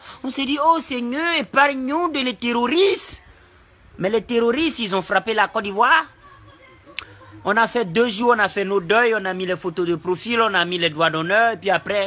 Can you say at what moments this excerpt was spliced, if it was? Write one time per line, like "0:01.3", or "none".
0:05.0